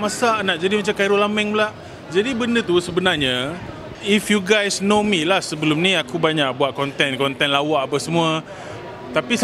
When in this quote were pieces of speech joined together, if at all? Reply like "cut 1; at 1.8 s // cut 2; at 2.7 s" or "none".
cut 1; at 3.9 s